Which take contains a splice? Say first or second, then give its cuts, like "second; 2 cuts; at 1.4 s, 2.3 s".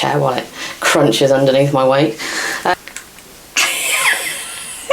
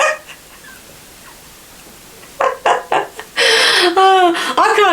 first; 1 cut; at 2.7 s